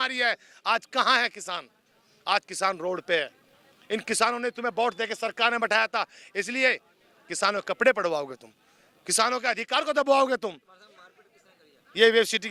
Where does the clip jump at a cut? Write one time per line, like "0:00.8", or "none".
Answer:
none